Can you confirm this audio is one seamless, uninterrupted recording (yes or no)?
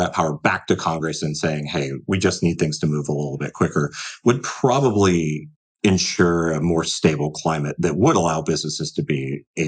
yes